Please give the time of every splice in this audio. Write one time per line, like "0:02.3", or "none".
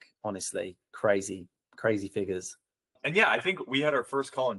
0:03.0